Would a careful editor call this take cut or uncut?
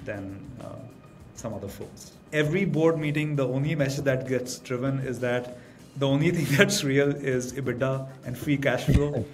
cut